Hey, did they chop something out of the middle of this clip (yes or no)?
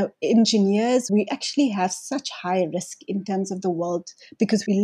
yes